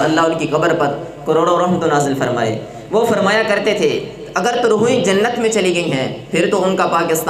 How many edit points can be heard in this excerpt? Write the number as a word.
zero